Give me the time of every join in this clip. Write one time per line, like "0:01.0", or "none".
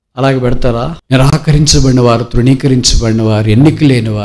0:01.0